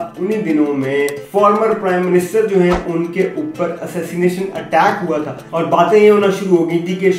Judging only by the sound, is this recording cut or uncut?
cut